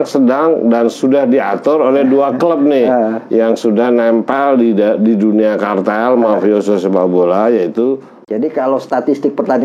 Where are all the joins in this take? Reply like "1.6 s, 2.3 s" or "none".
8.1 s